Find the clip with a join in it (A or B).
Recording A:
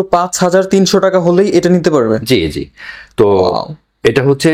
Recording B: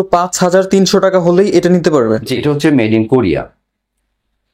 B